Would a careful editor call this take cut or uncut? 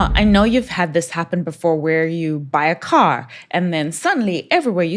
uncut